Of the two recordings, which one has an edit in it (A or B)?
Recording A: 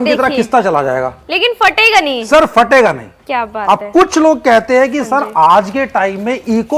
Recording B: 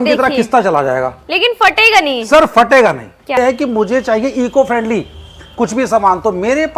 B